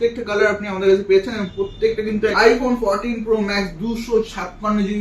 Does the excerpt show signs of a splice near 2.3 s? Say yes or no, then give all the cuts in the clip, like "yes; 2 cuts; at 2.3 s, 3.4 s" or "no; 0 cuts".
yes; 1 cut; at 2.3 s